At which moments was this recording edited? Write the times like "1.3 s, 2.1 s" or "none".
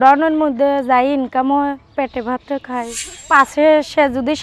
3.1 s